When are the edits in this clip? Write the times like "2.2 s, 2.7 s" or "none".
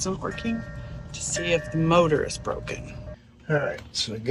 none

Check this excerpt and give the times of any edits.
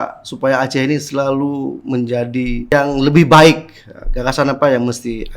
2.7 s

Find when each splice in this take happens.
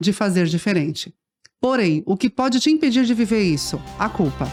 none

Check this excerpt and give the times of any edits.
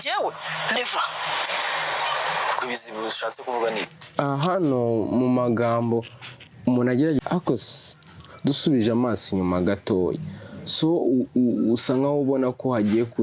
7.2 s

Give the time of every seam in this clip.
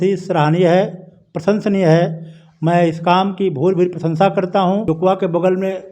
4.8 s

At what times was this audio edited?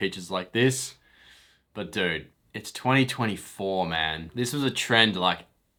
none

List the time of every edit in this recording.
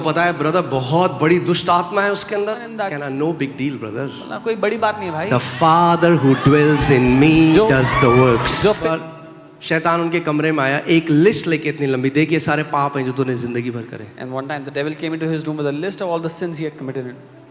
2.6 s, 8.8 s

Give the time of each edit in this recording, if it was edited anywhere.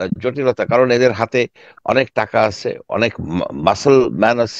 none

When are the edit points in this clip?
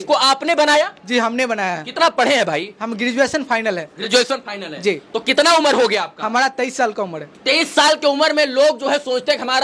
none

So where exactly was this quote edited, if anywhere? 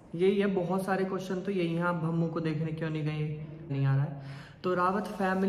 3.7 s

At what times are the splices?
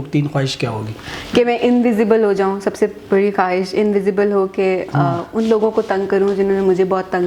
none

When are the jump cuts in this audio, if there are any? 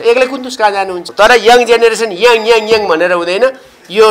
1.0 s

